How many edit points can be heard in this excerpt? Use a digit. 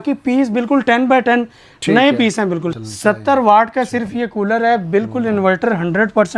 1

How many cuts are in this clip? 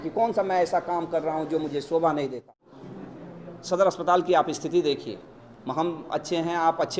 1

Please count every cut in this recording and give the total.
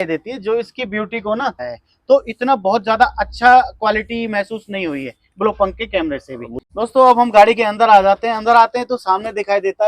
2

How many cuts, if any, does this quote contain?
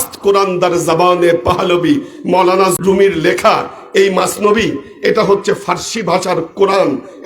1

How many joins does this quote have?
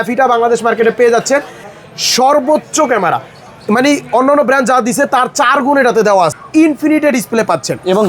2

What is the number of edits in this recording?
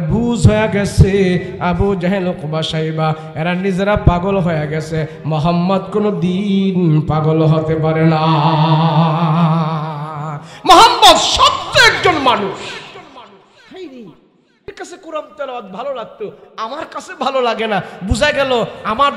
1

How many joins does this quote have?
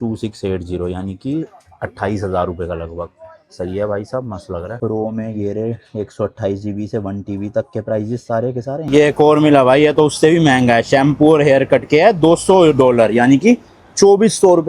2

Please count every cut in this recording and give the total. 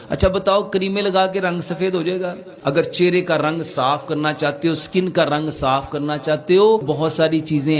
2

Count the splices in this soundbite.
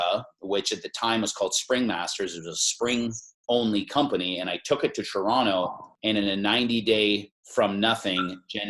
2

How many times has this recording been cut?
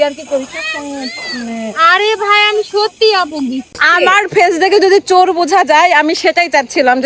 1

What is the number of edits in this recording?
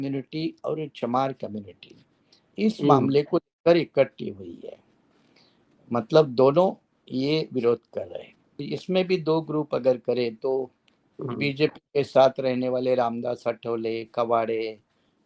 1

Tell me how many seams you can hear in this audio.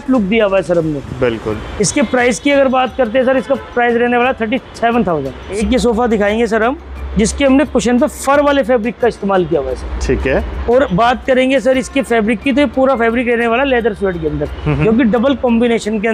0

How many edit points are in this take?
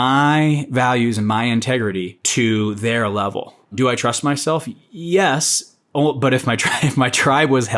2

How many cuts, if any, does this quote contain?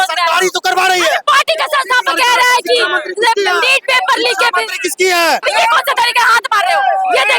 1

